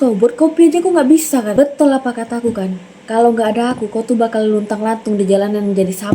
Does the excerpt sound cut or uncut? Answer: cut